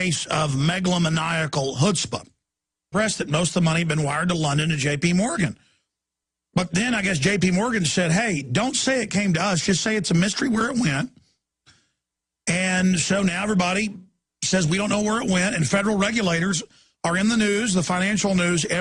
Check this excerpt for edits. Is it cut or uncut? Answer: uncut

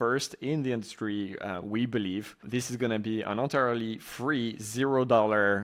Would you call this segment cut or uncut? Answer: uncut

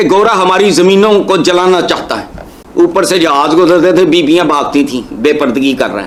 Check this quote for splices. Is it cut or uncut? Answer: uncut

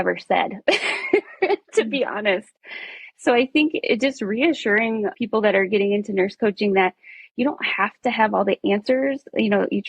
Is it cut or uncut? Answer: cut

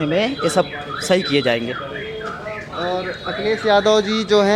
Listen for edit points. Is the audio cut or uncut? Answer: uncut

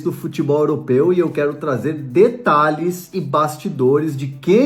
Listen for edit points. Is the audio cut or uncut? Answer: uncut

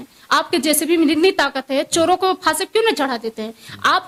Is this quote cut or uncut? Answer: uncut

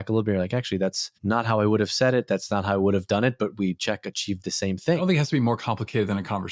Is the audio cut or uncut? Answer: cut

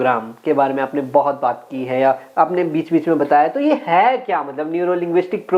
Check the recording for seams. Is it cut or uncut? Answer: uncut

